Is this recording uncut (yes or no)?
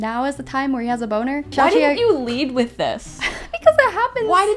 no